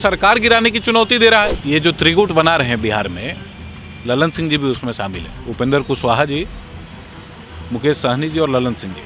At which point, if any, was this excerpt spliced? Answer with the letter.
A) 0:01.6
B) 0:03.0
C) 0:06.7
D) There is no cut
A